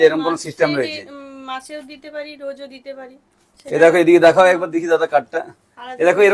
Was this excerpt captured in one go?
yes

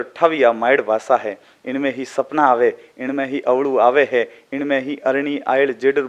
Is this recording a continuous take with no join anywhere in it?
yes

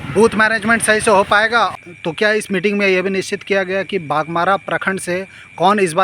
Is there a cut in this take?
yes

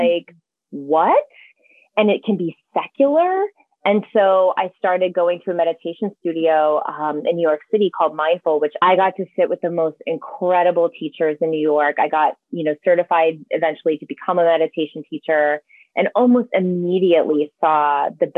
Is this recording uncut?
no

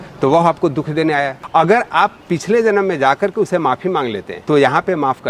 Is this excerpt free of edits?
no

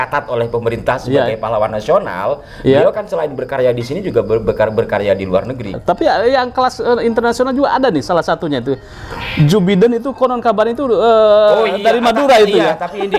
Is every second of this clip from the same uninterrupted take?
no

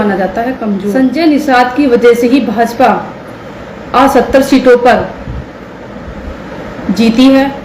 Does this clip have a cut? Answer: yes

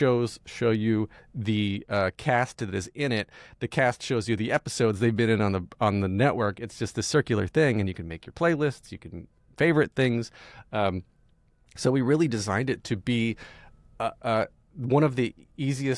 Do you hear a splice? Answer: no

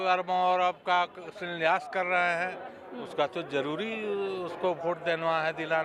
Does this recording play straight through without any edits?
yes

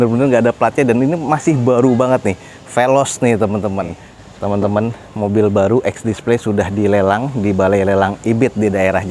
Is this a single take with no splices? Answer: no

